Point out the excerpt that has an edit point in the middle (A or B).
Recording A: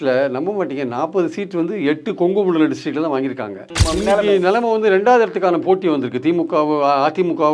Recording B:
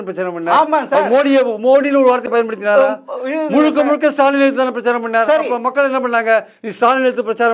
A